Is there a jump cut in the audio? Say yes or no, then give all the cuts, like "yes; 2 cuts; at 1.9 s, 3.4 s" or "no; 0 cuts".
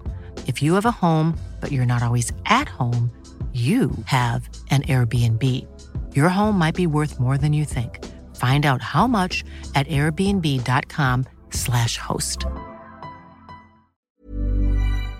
yes; 1 cut; at 14.2 s